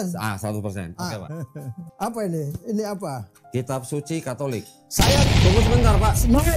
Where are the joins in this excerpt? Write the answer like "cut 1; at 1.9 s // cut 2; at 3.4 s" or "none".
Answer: cut 1; at 1.3 s